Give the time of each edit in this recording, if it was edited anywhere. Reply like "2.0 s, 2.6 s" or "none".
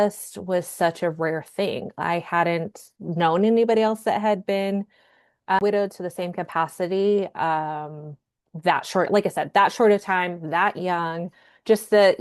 5.6 s